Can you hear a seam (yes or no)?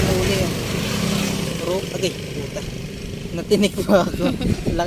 no